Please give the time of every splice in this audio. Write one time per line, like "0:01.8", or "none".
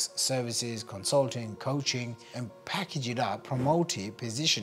0:02.2
0:03.4